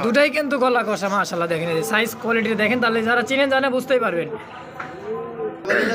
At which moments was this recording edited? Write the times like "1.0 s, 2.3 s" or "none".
none